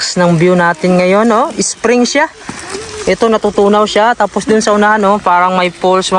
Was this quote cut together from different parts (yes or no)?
no